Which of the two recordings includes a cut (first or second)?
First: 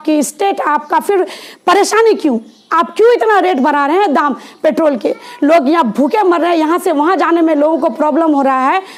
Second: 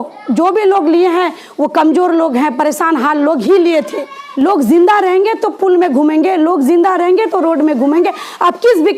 second